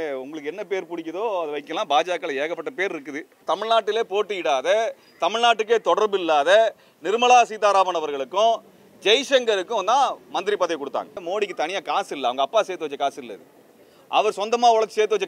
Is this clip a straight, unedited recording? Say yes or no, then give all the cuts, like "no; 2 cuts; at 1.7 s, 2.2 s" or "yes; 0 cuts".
no; 2 cuts; at 3.3 s, 11.2 s